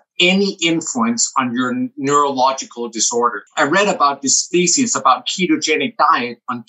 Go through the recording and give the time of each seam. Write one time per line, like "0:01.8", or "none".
0:03.4
0:04.4

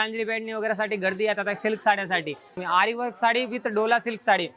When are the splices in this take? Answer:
0:02.6

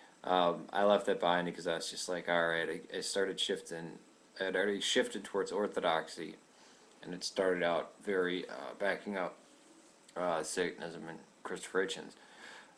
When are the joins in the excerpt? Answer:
none

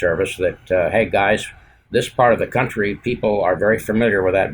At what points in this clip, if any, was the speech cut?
none

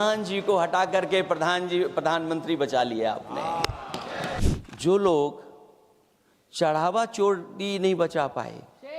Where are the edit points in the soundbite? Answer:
0:04.4

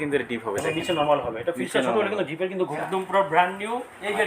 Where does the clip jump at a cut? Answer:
0:02.7

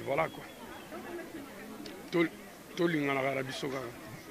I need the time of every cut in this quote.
0:00.9

